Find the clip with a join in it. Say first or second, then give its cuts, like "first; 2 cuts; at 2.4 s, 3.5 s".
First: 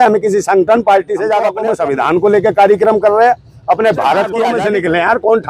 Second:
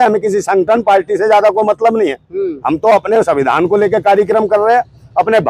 first; 2 cuts; at 1.6 s, 4.4 s